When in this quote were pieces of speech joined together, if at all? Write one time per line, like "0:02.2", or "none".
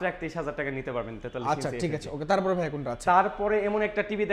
none